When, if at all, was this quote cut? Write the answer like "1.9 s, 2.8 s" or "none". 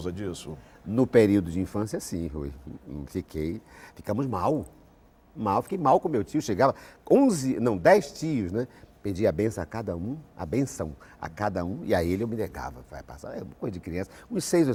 none